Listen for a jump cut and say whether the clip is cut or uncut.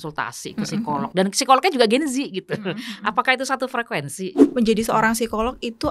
cut